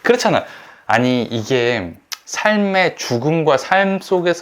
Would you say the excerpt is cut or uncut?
uncut